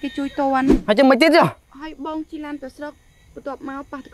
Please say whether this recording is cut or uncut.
cut